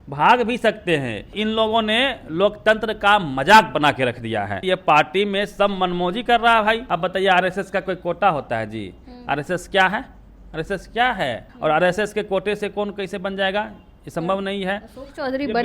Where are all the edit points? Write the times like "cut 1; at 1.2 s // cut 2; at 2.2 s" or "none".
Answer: cut 1; at 1.3 s // cut 2; at 4.6 s // cut 3; at 6.9 s // cut 4; at 11.5 s